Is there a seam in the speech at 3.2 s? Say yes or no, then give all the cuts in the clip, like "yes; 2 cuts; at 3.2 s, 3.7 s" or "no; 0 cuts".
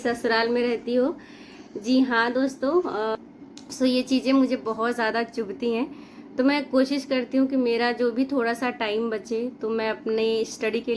yes; 1 cut; at 3.2 s